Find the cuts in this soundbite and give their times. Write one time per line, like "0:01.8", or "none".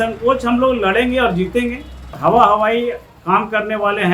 0:02.1